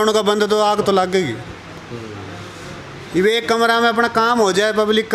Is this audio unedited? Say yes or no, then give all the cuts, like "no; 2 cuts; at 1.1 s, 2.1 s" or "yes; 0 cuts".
yes; 0 cuts